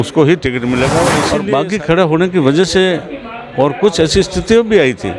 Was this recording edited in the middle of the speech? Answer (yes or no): yes